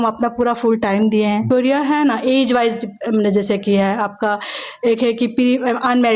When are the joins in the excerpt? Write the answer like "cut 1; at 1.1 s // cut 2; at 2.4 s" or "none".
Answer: cut 1; at 1.4 s